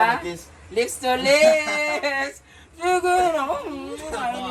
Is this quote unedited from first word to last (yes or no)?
yes